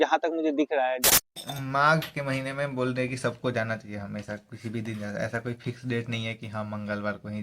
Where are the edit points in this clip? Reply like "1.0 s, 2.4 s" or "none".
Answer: 1.2 s